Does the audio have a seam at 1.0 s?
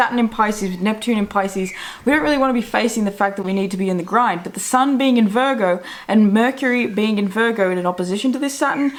no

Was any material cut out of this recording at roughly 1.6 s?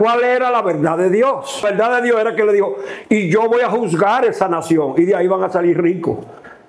yes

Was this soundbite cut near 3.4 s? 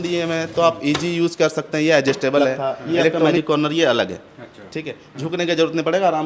yes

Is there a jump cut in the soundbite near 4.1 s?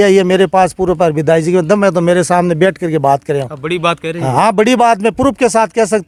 no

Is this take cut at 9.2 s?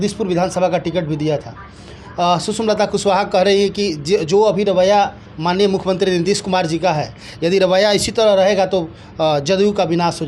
no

